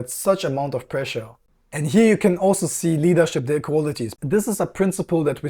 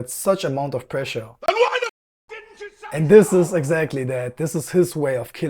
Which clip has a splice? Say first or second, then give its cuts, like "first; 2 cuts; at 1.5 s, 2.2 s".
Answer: first; 2 cuts; at 1.3 s, 4.1 s